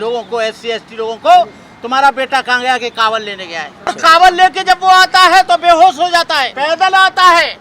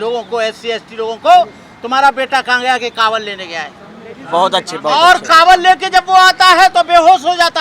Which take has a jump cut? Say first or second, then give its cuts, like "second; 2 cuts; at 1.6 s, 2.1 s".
first; 2 cuts; at 4.0 s, 6.5 s